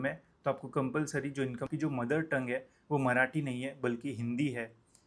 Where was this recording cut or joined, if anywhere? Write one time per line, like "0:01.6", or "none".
0:01.7